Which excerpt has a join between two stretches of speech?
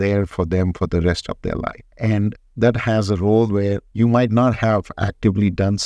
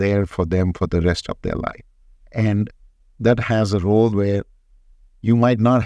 first; 2 cuts; at 2.2 s, 3.8 s

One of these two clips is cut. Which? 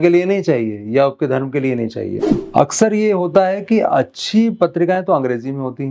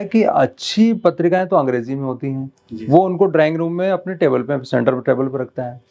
first; 1 cut; at 2.3 s

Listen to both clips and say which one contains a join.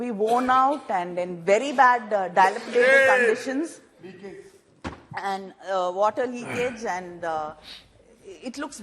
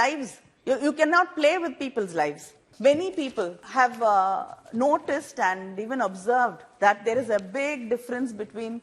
second; 2 cuts; at 2.7 s, 3.6 s

